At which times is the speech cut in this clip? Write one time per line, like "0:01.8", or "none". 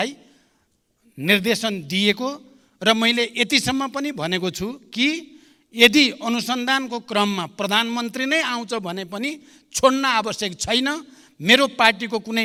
none